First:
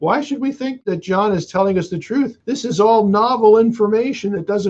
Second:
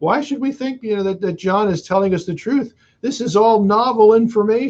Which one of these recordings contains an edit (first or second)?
first